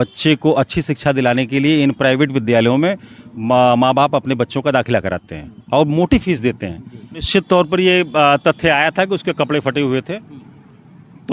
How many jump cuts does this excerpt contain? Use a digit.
1